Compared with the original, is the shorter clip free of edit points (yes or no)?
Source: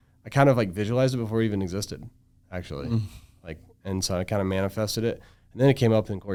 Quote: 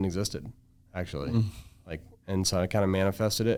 yes